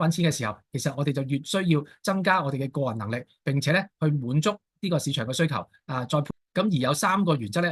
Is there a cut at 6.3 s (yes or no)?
yes